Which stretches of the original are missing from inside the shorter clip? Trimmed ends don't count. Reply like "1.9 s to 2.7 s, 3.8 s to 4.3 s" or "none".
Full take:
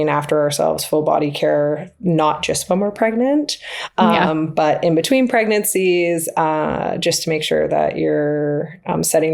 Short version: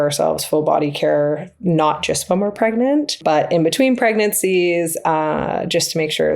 3.6 s to 4.5 s

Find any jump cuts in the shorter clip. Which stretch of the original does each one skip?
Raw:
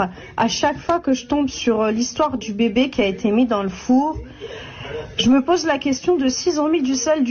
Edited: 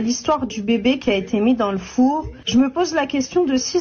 4.3 s to 5.1 s

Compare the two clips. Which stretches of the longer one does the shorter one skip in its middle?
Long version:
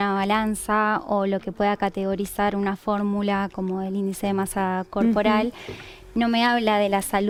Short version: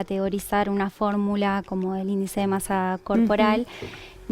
none

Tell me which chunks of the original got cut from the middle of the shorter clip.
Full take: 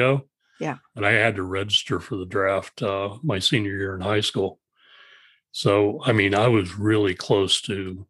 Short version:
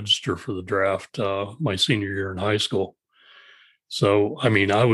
none

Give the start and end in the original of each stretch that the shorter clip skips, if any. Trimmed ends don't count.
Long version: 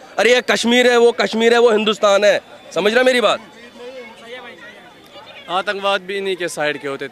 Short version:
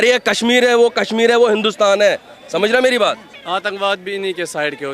3.5 s to 5.3 s

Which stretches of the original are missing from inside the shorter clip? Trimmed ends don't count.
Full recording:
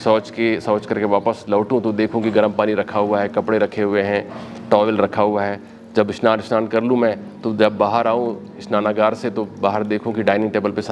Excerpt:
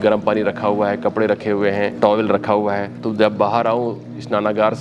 4.2 s to 4.6 s, 5.7 s to 7.4 s

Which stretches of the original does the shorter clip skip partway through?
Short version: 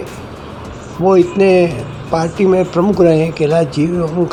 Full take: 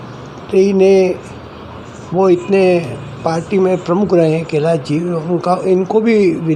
none

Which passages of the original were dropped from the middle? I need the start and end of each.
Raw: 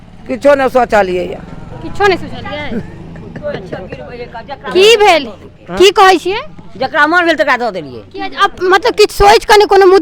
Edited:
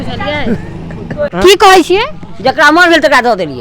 3.5 s to 5.6 s

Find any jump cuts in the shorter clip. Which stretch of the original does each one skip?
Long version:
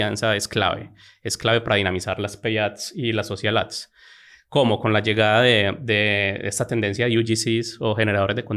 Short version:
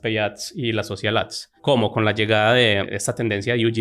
3.8 s to 4.3 s, 5.8 s to 6.4 s

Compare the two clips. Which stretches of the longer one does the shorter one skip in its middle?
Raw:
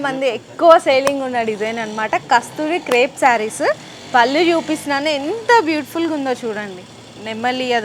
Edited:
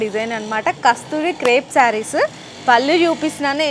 none

